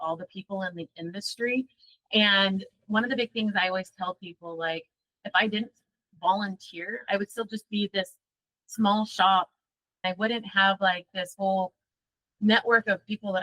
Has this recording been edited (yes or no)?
yes